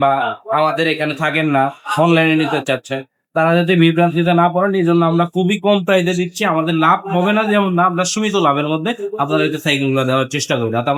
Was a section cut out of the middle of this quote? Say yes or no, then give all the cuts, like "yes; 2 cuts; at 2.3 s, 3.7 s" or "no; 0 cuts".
no; 0 cuts